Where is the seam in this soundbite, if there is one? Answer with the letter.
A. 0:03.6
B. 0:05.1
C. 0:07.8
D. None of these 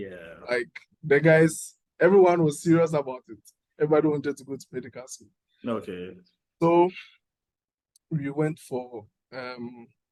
D